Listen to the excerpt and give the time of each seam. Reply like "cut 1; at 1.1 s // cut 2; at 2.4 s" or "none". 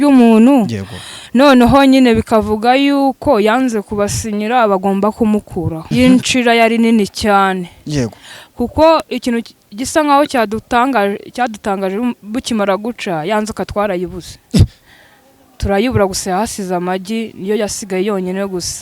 cut 1; at 5.8 s